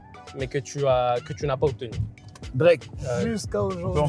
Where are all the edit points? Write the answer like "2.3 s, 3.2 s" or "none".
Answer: 2.9 s